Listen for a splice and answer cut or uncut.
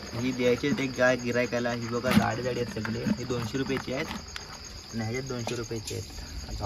uncut